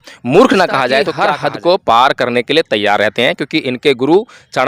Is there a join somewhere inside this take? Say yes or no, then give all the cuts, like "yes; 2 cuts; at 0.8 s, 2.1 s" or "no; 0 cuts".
yes; 1 cut; at 1.1 s